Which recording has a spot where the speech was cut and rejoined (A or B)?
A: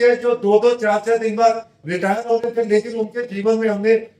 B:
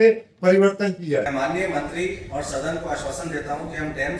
B